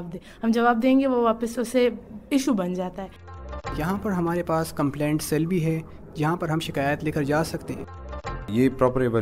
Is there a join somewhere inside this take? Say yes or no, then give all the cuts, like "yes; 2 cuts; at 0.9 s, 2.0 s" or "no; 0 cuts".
yes; 2 cuts; at 3.4 s, 8.1 s